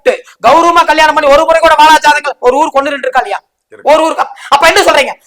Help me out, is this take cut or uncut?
uncut